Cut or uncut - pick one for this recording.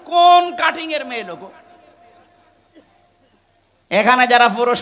uncut